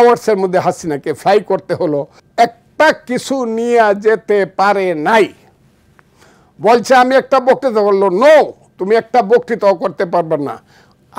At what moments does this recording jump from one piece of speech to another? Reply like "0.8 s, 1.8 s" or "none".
2.2 s